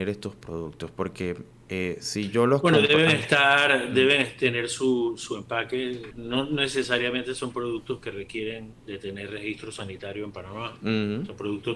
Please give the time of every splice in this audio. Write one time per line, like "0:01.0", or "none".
0:01.5
0:06.1
0:08.7